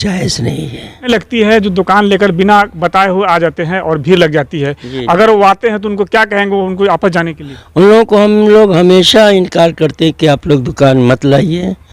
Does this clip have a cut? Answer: yes; 1 cut; at 1.1 s

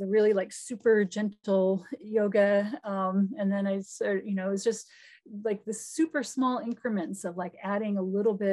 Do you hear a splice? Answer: no; 0 cuts

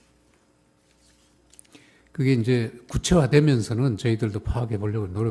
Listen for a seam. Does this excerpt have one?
yes; 1 cut; at 1.4 s

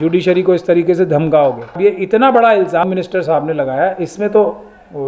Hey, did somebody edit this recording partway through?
yes; 2 cuts; at 1.7 s, 2.8 s

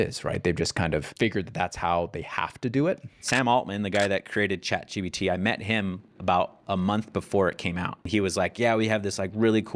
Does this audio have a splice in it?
yes; 3 cuts; at 1.1 s, 3.2 s, 8.0 s

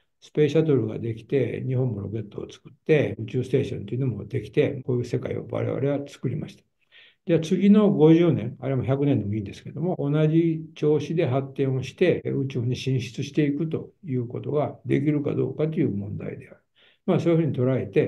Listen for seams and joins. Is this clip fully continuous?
no; 2 cuts; at 4.8 s, 12.2 s

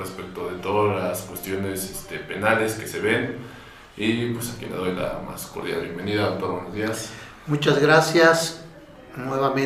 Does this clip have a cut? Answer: yes; 1 cut; at 5.0 s

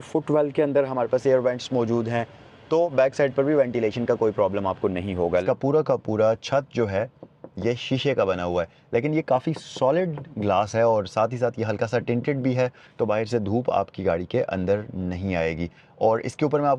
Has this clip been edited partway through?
yes; 1 cut; at 5.4 s

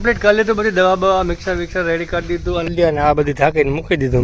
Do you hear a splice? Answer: yes; 1 cut; at 2.7 s

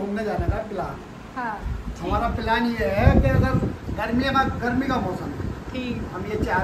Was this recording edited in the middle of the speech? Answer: no; 0 cuts

